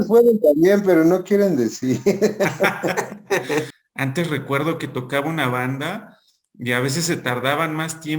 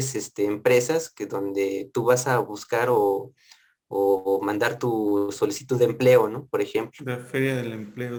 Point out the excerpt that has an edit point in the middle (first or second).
first